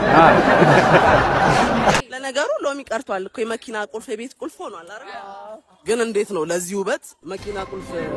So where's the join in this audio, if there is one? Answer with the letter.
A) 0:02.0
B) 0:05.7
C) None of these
A